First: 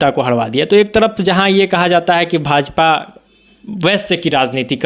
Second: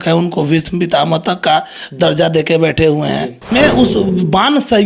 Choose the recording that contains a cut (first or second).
second